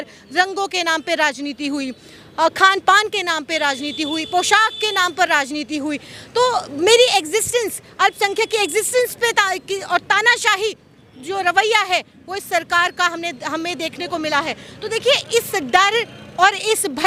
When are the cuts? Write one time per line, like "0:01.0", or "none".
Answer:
none